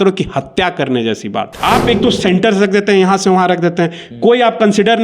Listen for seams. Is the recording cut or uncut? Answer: cut